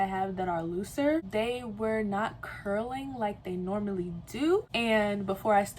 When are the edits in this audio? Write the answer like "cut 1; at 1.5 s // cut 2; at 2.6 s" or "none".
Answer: cut 1; at 1.3 s // cut 2; at 4.7 s